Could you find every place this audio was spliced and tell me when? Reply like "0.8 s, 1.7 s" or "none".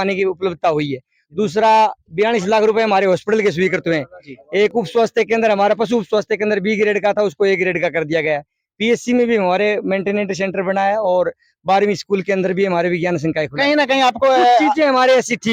none

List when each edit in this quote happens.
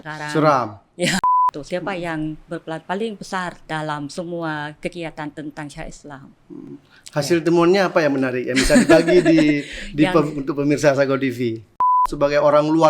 1.2 s, 3.6 s, 12.1 s

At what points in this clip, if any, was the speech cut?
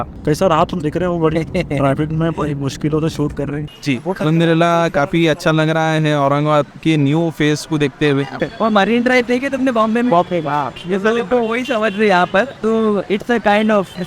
3.7 s, 8.4 s

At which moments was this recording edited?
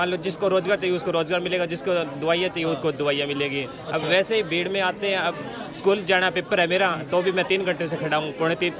none

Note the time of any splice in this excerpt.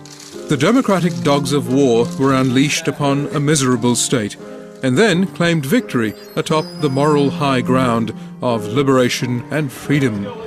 9.5 s

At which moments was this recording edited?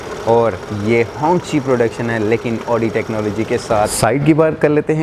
3.9 s

